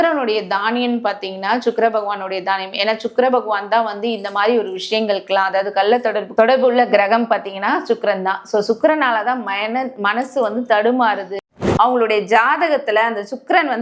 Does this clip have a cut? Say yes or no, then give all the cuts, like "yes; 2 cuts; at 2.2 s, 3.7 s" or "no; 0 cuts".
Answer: yes; 1 cut; at 11.5 s